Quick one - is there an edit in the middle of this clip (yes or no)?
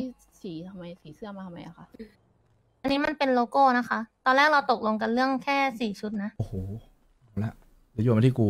yes